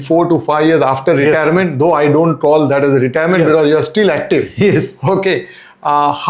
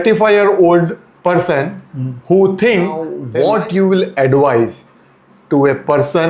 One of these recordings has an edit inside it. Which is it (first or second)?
second